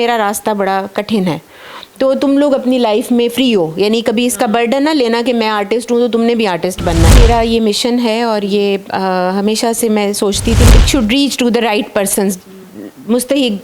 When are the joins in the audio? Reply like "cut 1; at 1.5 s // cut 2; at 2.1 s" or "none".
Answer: cut 1; at 7.2 s // cut 2; at 10.7 s